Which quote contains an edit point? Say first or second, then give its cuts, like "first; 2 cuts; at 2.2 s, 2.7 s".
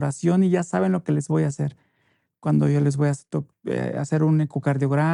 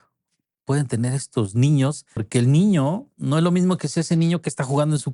second; 1 cut; at 2.3 s